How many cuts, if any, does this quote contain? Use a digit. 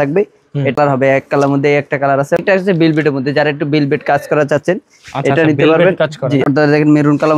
3